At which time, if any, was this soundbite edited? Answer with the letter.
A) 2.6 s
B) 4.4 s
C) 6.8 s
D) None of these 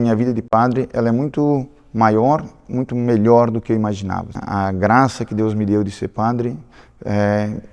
B